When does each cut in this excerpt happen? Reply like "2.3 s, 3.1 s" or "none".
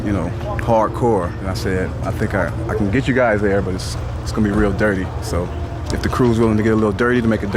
none

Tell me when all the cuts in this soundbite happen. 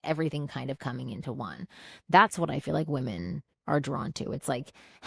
none

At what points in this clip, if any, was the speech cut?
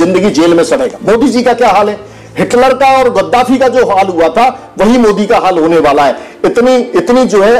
1.0 s

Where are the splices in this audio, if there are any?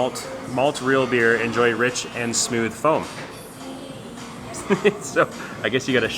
none

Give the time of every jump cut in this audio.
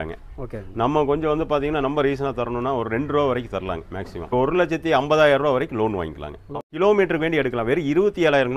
4.3 s, 6.6 s

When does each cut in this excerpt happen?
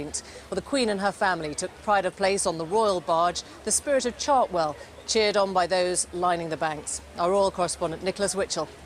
6.5 s

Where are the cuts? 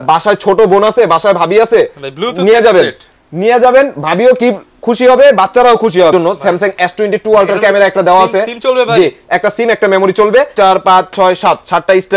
6.1 s, 10.5 s

